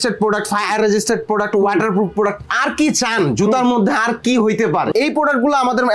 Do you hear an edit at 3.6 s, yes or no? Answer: no